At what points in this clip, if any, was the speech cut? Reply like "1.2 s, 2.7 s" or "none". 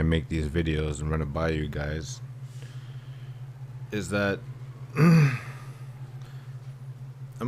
1.0 s